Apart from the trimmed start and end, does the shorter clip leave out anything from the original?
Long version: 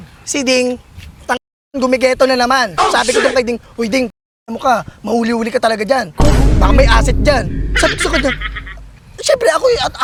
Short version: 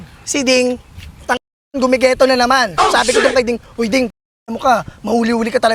no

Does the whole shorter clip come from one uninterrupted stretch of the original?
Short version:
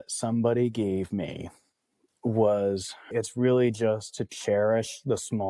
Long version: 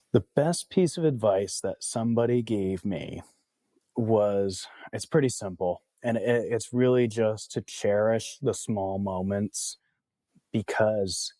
no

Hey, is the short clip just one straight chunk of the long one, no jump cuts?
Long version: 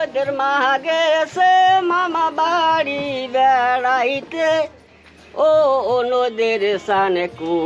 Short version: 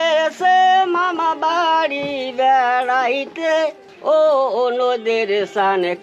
no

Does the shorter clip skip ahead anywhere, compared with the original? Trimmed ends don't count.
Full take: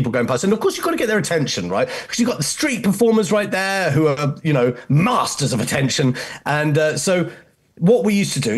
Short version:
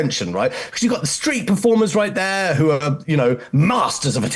no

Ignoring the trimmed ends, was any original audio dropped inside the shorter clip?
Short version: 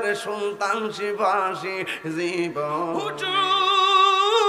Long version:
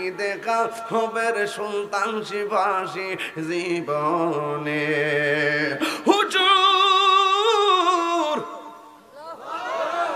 yes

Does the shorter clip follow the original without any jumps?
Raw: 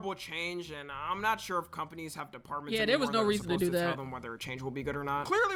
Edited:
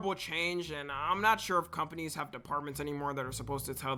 yes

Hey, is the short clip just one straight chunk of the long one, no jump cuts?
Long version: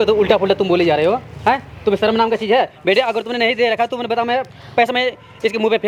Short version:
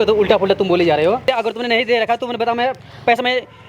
no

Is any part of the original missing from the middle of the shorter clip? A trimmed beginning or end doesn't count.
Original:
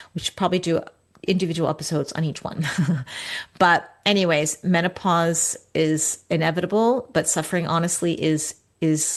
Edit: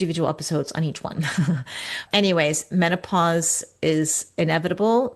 yes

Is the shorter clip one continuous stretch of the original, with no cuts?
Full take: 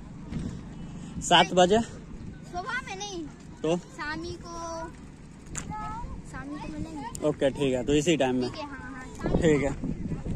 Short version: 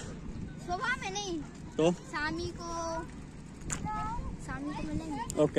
yes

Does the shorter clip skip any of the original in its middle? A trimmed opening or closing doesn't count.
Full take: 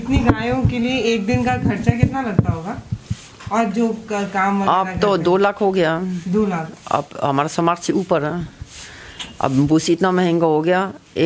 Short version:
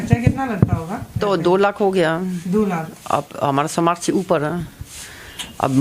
yes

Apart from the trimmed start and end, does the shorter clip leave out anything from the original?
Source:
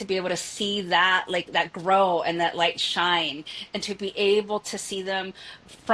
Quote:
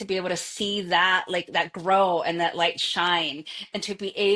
no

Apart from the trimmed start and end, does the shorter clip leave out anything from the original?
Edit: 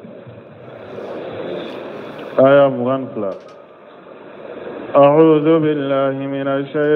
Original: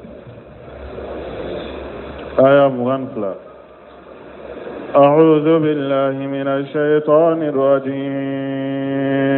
no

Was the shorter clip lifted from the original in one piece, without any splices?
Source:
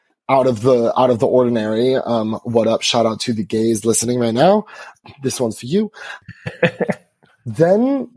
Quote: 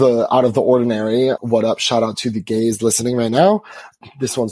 no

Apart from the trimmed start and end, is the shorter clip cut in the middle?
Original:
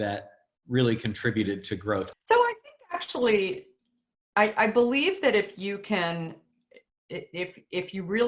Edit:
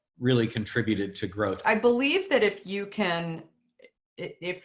yes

